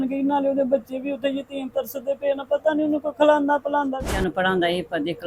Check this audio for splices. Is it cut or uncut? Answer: cut